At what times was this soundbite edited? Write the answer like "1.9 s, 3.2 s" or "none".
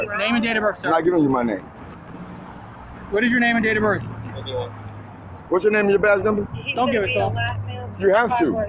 none